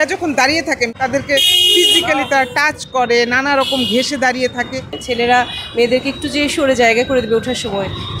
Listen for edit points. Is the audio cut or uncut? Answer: cut